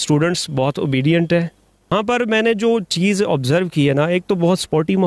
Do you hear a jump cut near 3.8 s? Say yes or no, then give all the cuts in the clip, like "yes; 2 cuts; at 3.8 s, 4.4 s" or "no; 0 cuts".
no; 1 cut; at 1.9 s